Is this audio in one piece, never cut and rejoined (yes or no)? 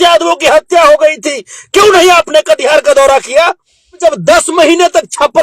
no